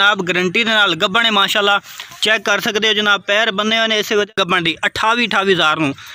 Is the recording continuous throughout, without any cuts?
no; 1 cut; at 4.3 s

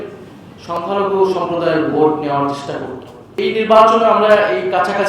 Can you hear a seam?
yes; 1 cut; at 3.2 s

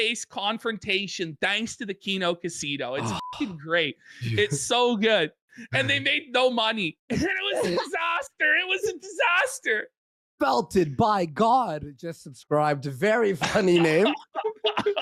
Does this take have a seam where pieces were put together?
no; 0 cuts

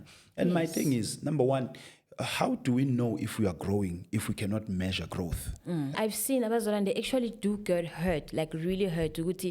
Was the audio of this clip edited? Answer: yes; 1 cut; at 5.9 s

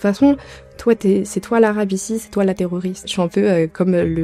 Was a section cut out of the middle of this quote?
yes; 1 cut; at 3.1 s

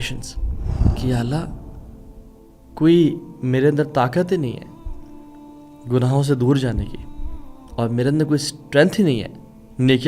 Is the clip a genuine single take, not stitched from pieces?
no; 1 cut; at 0.9 s

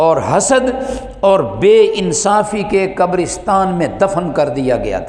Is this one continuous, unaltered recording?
yes; 0 cuts

